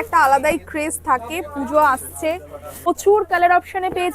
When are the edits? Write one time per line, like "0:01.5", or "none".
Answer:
0:02.9